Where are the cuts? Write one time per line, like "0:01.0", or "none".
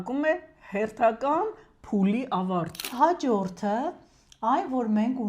0:02.9

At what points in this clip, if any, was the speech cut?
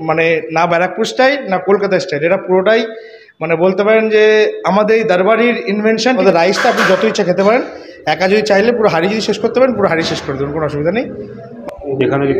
0:06.2
0:11.5

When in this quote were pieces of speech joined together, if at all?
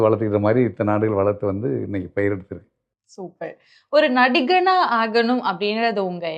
none

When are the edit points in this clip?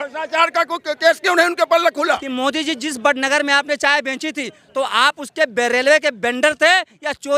0:02.3

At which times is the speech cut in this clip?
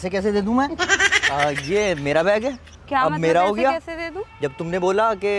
none

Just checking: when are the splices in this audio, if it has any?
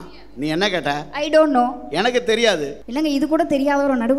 0:02.8

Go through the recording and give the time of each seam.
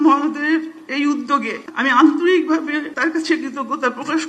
0:01.6
0:02.9

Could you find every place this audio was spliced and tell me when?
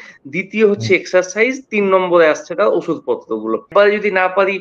0:03.7

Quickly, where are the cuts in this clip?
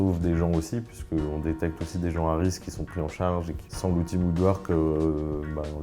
0:03.6

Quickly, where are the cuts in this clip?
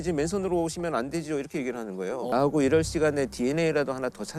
0:02.3

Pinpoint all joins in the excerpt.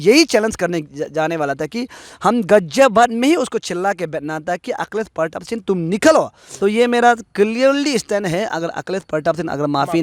0:06.4

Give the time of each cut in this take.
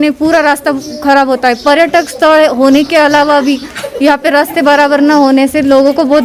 none

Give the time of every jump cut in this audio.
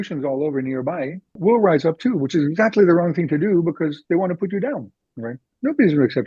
0:01.4

